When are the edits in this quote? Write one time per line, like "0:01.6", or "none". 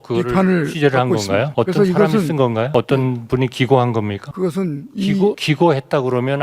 0:02.7
0:04.2
0:05.4